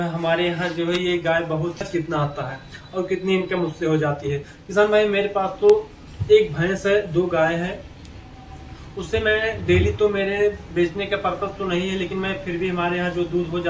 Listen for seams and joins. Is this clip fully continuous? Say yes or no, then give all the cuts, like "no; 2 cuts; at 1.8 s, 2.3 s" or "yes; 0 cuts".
no; 1 cut; at 1.9 s